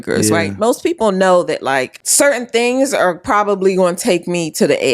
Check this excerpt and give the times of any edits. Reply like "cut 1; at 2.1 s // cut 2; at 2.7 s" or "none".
cut 1; at 2.0 s